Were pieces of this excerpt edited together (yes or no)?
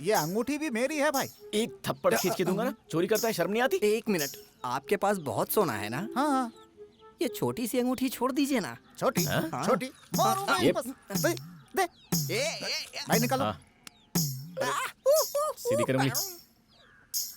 no